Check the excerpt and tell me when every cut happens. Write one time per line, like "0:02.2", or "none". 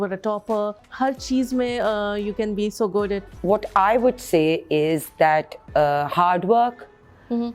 0:00.8
0:03.2